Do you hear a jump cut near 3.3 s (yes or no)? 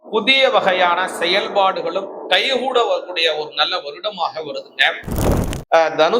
no